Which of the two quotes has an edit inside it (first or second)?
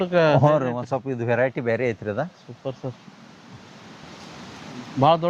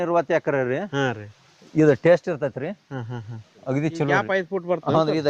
second